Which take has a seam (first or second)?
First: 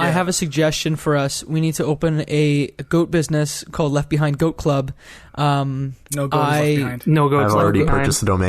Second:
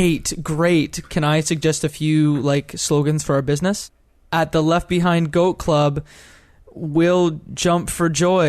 second